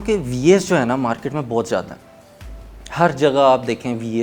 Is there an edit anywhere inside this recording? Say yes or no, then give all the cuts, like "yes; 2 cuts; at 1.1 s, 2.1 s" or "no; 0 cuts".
no; 0 cuts